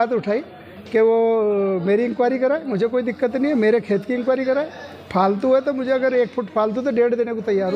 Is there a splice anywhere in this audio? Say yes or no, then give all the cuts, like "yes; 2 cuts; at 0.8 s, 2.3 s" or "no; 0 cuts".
no; 0 cuts